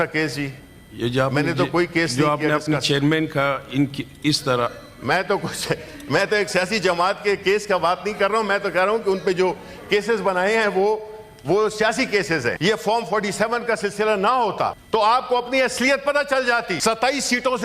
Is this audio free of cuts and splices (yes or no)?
no